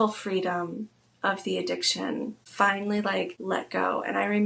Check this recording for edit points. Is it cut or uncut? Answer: cut